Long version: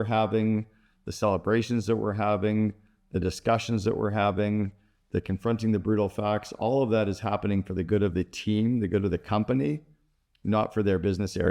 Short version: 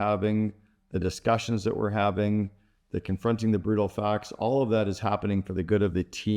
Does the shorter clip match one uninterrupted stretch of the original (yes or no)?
yes